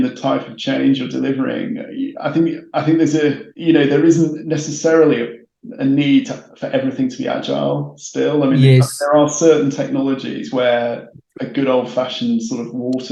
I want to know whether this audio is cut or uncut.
uncut